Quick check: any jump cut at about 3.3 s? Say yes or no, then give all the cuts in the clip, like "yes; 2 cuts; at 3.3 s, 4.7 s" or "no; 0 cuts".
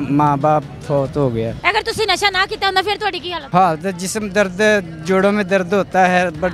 yes; 2 cuts; at 1.6 s, 3.3 s